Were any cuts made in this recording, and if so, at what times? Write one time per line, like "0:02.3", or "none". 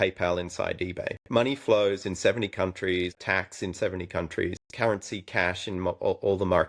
0:01.2
0:03.2
0:04.6